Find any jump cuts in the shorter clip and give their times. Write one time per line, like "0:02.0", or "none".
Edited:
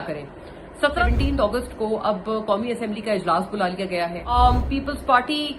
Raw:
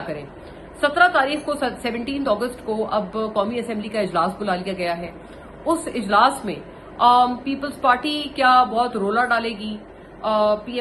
0:01.0
0:04.3